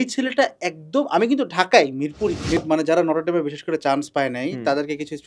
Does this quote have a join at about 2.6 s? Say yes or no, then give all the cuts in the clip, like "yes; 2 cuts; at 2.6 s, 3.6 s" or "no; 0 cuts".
yes; 1 cut; at 2.6 s